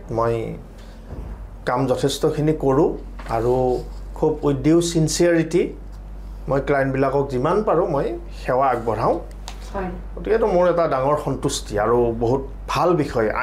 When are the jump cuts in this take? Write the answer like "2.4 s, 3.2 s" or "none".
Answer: none